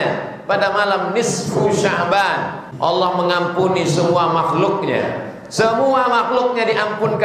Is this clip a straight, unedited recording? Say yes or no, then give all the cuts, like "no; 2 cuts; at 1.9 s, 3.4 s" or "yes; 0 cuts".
no; 1 cut; at 2.6 s